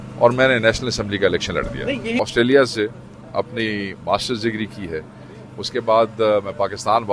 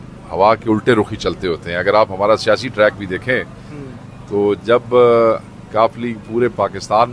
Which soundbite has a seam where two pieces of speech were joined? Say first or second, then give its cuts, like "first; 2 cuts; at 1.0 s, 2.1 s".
first; 1 cut; at 2.2 s